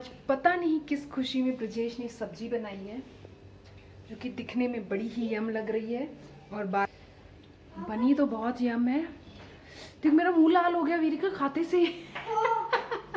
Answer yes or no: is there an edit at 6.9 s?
yes